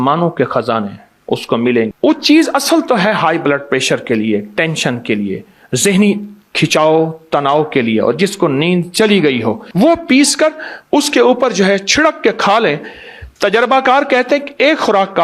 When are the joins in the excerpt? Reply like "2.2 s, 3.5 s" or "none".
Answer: 1.9 s, 9.6 s